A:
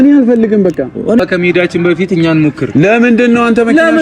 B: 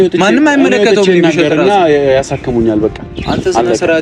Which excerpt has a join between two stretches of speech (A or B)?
A